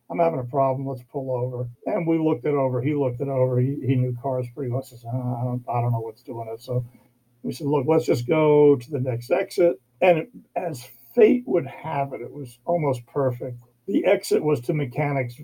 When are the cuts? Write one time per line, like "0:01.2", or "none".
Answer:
none